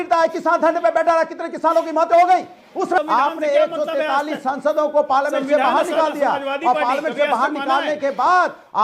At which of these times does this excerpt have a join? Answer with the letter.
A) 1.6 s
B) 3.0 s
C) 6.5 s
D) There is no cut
B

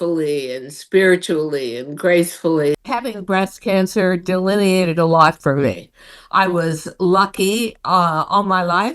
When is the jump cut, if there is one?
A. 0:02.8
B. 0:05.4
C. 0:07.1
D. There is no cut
A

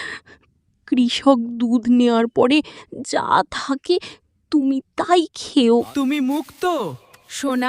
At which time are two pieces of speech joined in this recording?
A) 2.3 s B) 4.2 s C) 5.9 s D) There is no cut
C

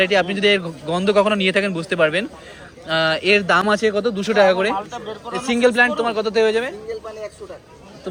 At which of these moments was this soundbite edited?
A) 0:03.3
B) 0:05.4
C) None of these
C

